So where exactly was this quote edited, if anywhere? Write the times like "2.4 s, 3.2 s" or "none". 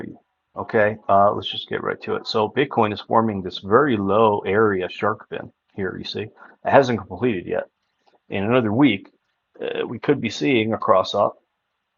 none